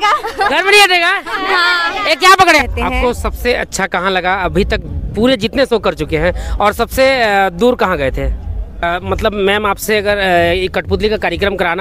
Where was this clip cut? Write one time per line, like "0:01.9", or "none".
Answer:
0:02.6
0:08.8